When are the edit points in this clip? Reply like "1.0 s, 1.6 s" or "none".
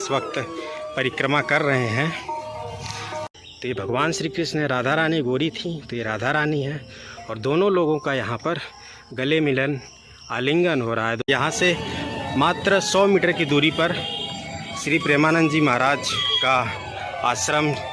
3.2 s, 11.3 s

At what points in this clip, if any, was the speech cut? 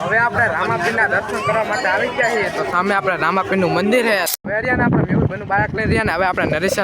4.3 s

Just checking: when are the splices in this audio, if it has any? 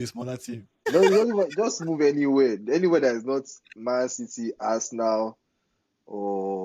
0.9 s

